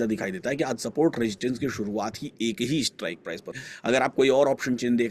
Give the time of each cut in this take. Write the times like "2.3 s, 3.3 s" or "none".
3.5 s

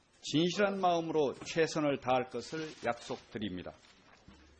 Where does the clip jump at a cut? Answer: 1.0 s

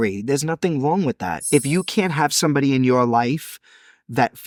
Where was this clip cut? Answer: none

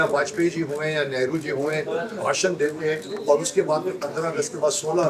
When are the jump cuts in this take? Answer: none

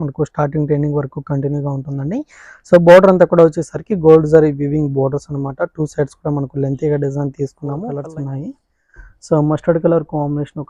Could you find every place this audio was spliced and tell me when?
7.9 s

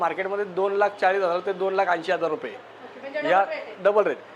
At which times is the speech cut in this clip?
none

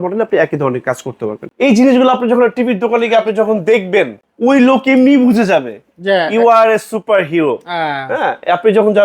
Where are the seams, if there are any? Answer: 1.5 s, 4.2 s

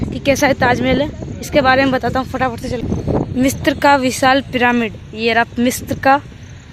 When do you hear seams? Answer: 2.9 s

